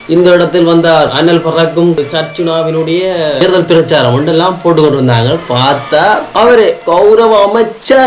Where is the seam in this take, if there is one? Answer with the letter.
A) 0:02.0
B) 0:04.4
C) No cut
A